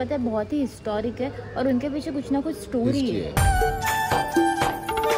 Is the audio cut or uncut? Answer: cut